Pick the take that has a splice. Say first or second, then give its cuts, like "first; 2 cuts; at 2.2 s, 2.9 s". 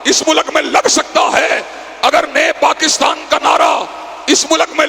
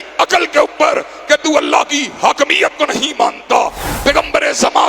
second; 1 cut; at 3.8 s